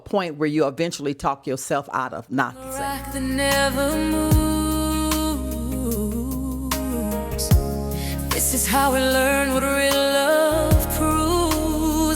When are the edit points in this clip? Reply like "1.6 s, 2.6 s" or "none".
2.6 s